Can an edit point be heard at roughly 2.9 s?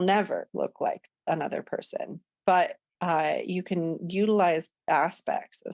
yes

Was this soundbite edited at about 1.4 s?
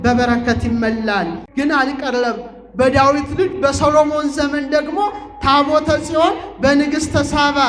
yes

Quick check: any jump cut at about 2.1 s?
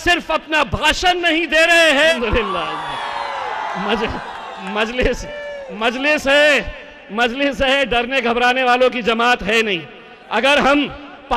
yes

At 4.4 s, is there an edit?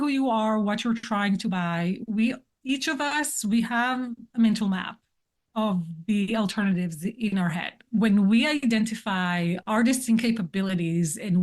no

